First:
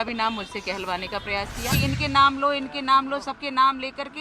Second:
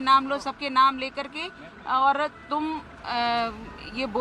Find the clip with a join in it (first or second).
first